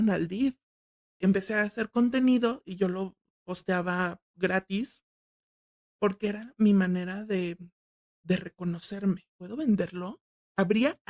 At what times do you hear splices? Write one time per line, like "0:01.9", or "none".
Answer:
0:01.2
0:09.4